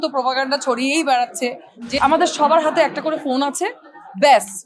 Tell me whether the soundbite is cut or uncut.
cut